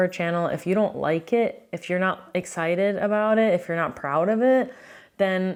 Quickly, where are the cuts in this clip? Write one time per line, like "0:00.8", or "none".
none